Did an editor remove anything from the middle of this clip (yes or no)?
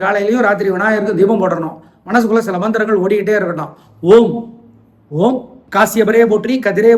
no